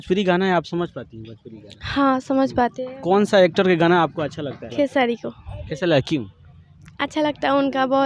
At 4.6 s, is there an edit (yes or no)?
yes